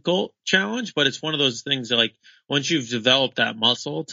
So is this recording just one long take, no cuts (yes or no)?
yes